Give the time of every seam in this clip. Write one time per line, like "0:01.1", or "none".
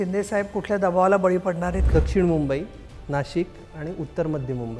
0:01.8

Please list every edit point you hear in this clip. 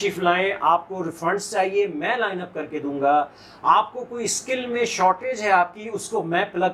none

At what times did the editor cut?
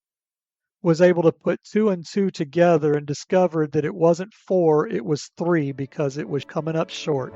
0:06.5

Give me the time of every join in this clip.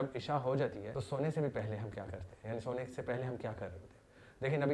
none

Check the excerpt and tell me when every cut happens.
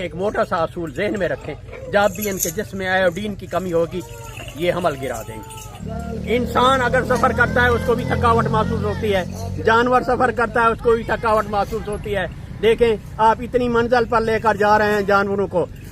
0:05.7

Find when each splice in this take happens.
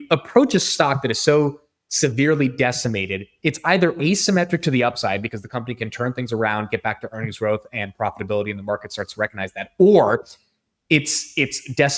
none

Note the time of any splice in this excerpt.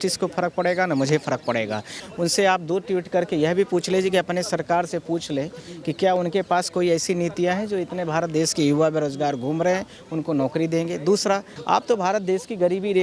0:01.9
0:11.5

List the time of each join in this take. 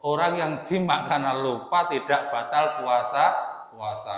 none

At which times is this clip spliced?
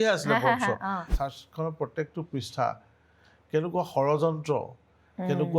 0:01.1

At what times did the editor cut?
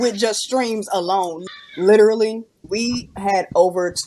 0:01.5
0:02.6

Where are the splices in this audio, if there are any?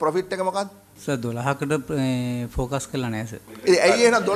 none

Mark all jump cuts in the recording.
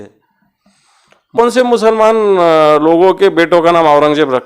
0:01.4

